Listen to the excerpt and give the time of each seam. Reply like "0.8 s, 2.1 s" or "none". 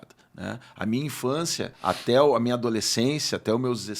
1.7 s